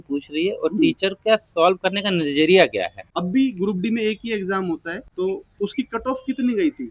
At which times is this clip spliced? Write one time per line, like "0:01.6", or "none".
0:03.0
0:05.0